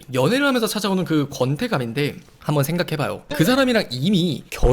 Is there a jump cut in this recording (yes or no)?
no